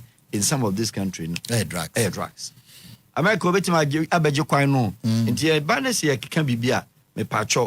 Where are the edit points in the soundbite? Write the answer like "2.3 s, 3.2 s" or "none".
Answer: 3.0 s